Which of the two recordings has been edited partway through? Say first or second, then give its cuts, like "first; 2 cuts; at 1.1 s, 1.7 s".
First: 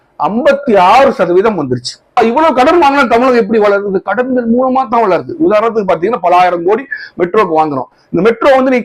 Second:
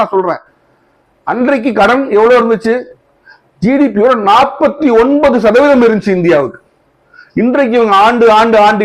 first; 1 cut; at 2.2 s